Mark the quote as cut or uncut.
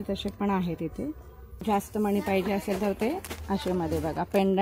cut